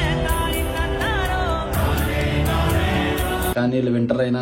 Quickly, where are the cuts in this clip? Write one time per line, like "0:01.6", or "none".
0:03.5